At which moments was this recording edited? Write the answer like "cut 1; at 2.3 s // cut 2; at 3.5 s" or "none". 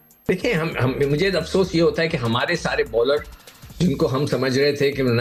none